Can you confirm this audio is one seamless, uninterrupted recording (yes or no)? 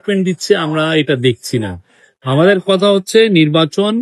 yes